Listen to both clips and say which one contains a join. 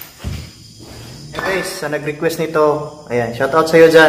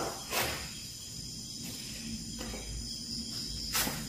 first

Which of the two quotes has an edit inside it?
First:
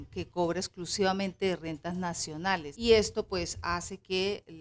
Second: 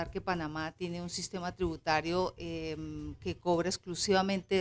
first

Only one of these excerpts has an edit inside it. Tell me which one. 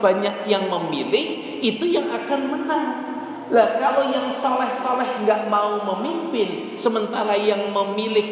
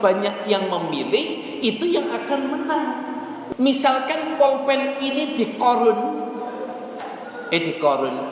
second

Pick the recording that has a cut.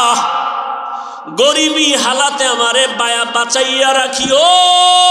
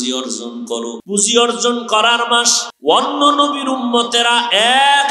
second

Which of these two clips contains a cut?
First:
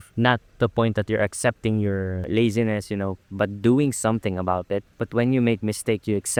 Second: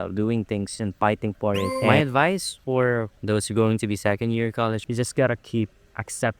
second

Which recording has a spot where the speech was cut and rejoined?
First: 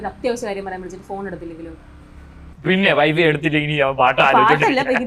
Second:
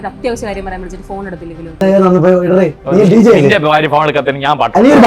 second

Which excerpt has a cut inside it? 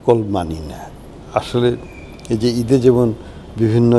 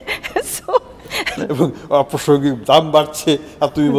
second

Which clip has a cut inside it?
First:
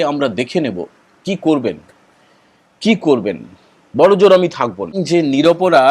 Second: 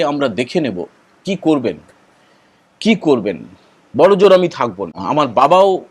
first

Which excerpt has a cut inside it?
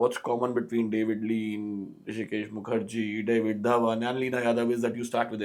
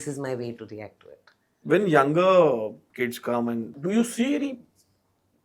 second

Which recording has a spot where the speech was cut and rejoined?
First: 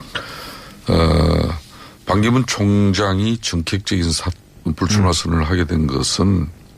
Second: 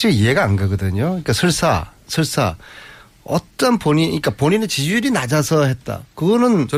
first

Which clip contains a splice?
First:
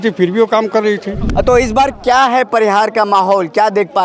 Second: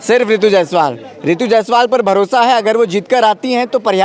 first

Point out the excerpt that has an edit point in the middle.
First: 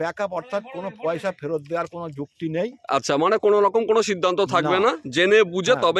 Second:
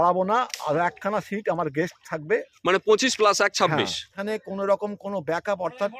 second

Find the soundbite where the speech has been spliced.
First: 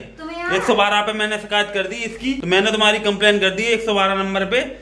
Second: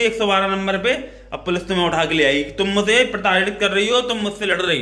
first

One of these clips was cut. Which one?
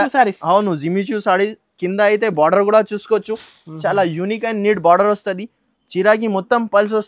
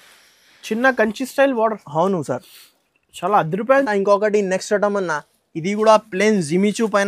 second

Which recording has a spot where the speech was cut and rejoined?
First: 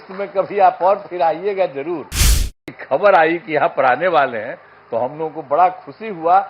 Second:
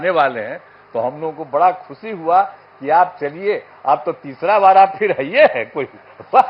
first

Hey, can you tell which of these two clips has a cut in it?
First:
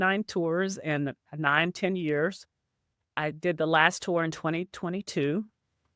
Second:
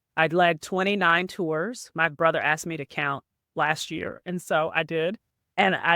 first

